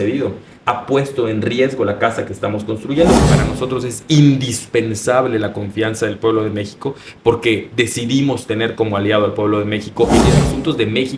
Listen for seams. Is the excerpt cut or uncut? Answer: cut